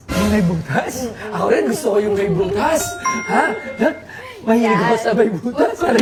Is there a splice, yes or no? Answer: no